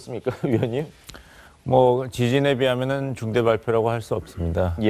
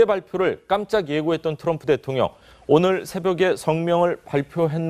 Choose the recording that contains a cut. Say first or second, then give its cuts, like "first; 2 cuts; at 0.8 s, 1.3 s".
first; 1 cut; at 3.6 s